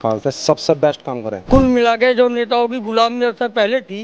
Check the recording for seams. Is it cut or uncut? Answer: cut